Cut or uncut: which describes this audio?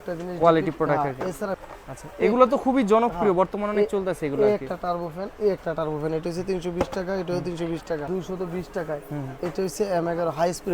cut